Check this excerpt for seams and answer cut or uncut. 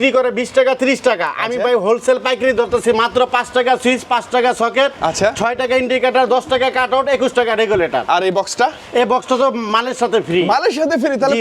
uncut